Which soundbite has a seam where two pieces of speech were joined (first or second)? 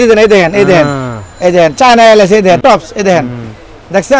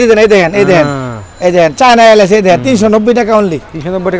first